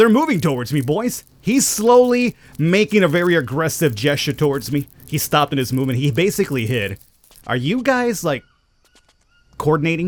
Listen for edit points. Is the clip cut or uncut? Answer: uncut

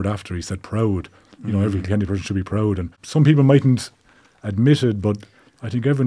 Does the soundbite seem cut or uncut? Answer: cut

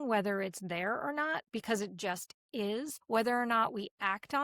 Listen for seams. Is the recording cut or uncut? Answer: cut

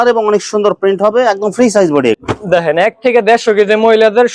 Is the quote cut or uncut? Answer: cut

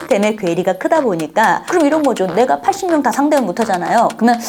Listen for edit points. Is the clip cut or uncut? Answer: uncut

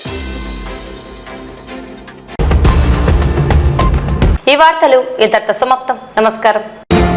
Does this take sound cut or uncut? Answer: uncut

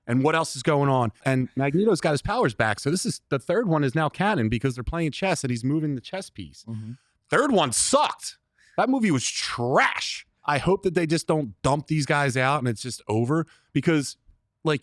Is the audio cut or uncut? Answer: cut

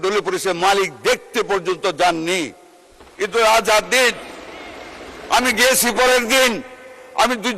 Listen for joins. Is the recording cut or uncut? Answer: uncut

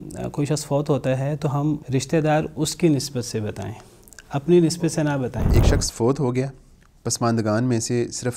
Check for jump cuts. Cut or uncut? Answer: cut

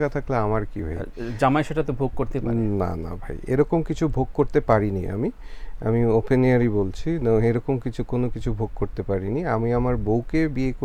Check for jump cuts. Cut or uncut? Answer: uncut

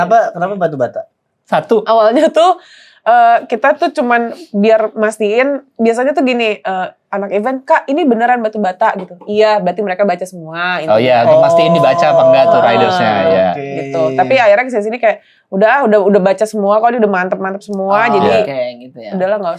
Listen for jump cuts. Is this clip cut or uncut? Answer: uncut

